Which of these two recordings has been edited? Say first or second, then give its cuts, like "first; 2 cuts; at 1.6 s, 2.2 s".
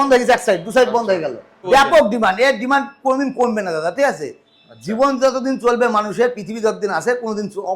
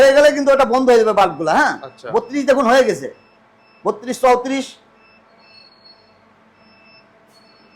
first; 1 cut; at 1.6 s